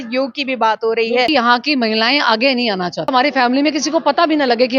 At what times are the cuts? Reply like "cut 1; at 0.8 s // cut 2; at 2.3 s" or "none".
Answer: cut 1; at 1.3 s // cut 2; at 3.1 s